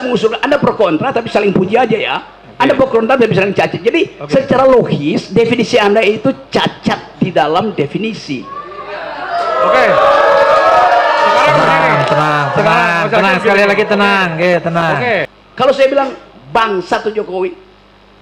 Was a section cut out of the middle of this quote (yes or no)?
yes